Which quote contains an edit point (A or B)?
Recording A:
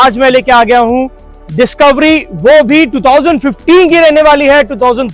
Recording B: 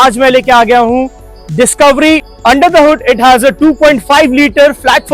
B